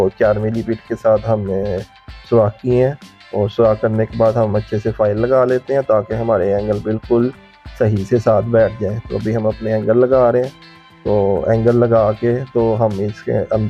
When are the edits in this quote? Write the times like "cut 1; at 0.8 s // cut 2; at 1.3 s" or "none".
none